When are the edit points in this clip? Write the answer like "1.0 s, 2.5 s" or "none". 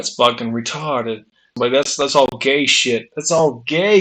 1.5 s